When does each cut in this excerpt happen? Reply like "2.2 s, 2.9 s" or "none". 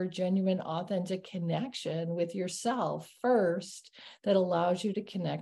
none

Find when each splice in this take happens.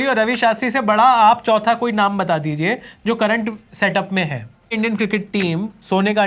4.7 s

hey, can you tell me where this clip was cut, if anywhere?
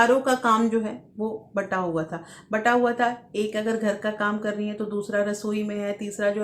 none

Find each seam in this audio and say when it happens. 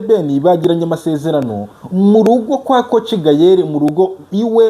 none

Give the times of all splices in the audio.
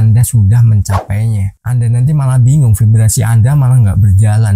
1.5 s

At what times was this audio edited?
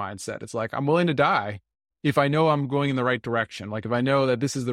none

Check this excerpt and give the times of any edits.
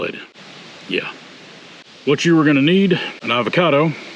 1.9 s, 3.2 s

